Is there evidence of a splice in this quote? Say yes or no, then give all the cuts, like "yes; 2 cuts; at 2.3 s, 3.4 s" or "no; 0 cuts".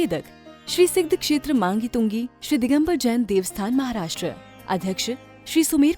no; 0 cuts